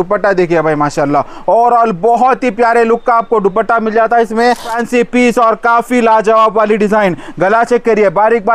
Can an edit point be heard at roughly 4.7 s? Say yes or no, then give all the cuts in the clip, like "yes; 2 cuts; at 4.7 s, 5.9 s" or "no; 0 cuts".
yes; 1 cut; at 4.7 s